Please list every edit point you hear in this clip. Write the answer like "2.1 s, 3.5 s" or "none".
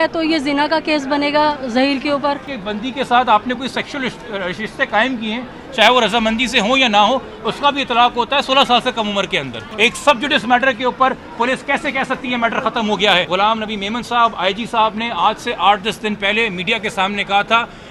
2.6 s, 9.6 s, 13.3 s